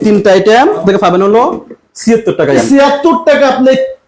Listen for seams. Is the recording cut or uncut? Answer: cut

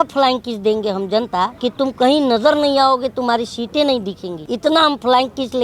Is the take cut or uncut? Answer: cut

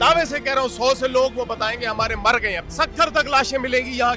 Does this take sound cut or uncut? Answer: cut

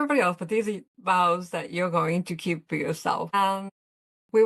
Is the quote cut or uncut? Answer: cut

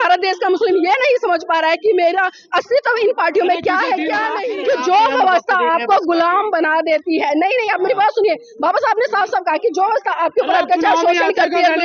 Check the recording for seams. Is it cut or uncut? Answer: cut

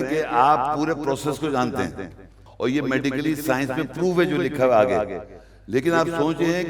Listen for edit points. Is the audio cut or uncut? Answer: cut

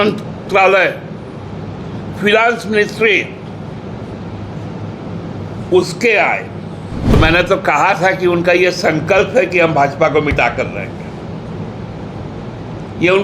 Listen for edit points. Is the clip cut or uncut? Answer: cut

